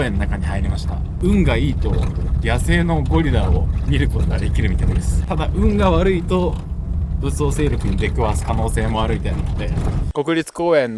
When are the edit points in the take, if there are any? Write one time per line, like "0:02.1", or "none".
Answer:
0:01.0
0:05.2
0:10.1